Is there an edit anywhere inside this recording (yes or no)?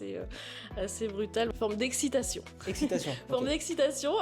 yes